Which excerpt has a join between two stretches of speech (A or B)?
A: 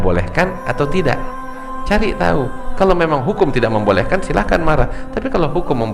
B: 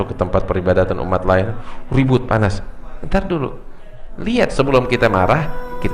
B